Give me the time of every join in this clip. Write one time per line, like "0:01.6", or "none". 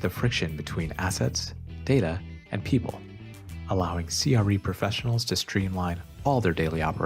none